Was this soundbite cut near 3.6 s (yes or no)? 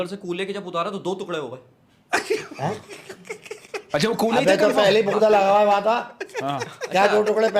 yes